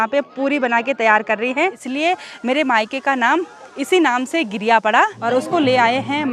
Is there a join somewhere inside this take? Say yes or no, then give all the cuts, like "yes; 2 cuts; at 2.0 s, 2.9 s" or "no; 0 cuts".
yes; 2 cuts; at 1.8 s, 5.1 s